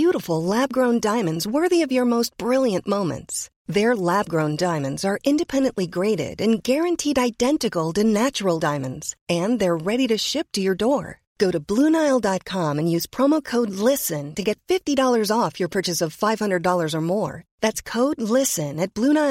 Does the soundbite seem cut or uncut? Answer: uncut